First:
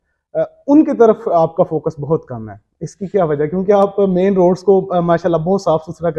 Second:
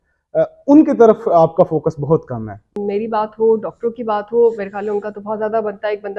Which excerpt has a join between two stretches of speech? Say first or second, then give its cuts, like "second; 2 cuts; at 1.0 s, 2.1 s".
second; 1 cut; at 2.7 s